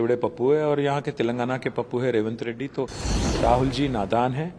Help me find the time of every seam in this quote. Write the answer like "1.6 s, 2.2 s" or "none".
3.0 s